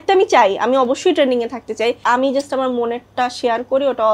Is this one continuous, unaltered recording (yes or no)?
no